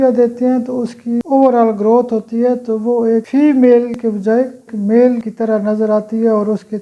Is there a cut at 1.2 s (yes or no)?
yes